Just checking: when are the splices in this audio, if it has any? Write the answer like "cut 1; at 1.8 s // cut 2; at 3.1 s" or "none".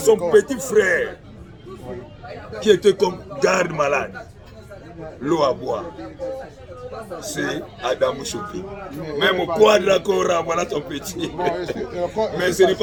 none